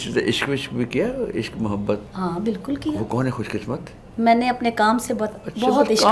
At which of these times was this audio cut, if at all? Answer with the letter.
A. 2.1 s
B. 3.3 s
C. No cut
A